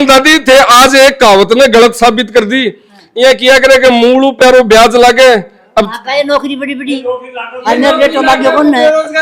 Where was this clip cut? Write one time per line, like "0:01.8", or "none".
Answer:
none